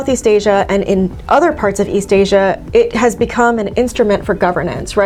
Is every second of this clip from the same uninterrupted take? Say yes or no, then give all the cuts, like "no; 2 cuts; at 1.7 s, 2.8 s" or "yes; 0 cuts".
yes; 0 cuts